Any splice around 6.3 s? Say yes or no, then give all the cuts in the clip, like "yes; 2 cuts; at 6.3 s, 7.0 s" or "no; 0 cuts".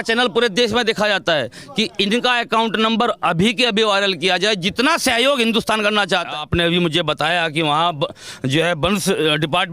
yes; 1 cut; at 6.3 s